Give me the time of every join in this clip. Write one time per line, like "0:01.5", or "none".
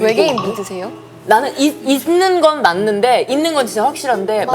0:01.2